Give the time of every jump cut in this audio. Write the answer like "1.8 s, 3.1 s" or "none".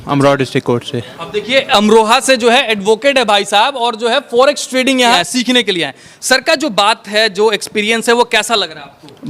5.2 s